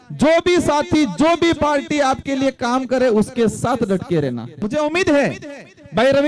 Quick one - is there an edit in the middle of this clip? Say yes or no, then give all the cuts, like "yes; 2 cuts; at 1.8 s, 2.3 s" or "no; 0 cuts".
yes; 1 cut; at 4.5 s